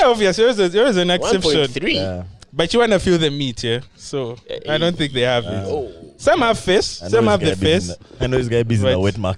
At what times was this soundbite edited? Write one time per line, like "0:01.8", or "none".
none